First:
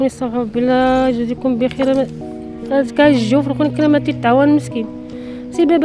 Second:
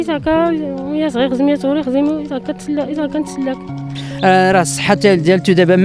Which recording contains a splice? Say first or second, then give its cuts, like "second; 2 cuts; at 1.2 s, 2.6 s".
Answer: second; 1 cut; at 4.0 s